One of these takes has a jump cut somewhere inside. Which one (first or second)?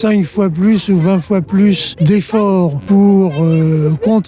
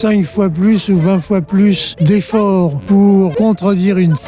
second